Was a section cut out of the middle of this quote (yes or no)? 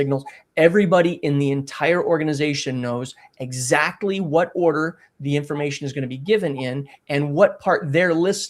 no